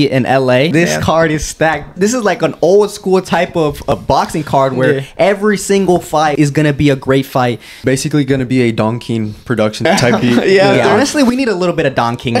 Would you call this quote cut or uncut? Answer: cut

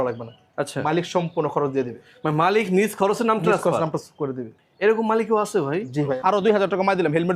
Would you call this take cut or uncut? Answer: cut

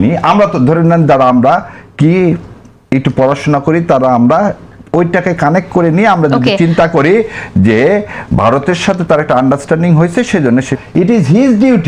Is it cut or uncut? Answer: cut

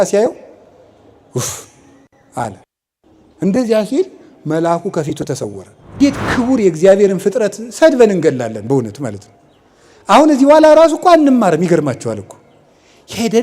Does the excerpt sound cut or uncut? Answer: cut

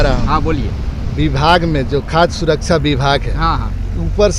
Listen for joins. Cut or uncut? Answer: uncut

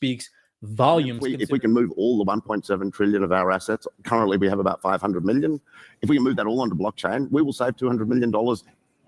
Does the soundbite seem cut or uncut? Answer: cut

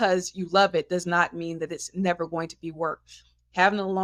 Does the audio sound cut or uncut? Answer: uncut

